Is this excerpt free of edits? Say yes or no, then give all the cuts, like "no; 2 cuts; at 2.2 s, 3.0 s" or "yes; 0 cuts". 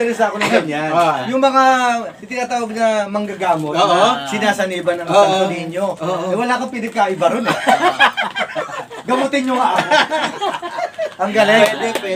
yes; 0 cuts